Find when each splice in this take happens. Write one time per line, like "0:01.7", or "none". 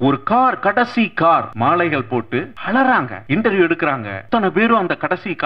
0:01.5
0:02.6
0:03.2
0:04.1